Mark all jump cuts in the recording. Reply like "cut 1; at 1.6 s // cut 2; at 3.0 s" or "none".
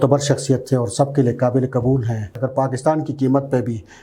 cut 1; at 2.3 s